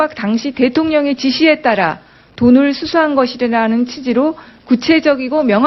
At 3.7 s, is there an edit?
no; 0 cuts

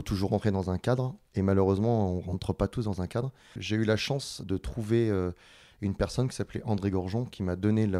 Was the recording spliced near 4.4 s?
yes; 2 cuts; at 3.6 s, 4.4 s

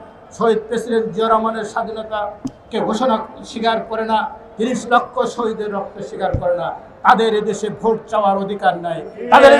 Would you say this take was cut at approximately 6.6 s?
no; 0 cuts

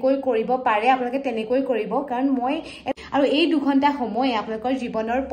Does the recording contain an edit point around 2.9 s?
yes; 1 cut; at 2.9 s

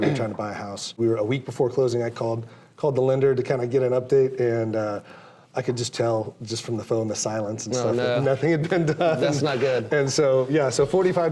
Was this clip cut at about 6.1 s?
no; 1 cut; at 1.0 s

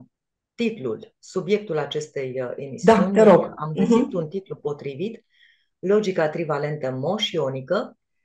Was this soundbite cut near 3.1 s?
no; 0 cuts

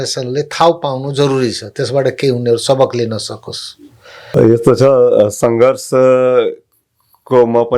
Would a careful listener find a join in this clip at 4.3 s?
yes; 1 cut; at 4.3 s

